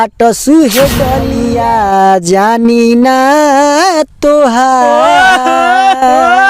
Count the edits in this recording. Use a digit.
1